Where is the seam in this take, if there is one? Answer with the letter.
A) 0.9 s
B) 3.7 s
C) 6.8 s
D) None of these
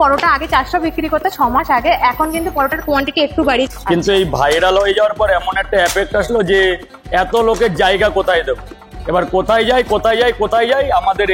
B